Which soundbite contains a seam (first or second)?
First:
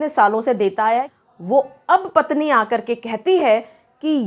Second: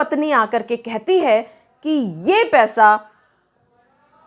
first